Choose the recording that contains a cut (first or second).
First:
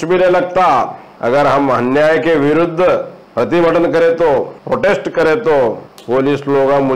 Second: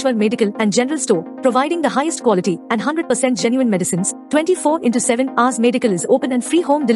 first